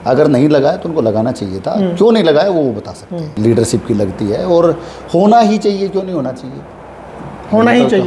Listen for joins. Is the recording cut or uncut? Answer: cut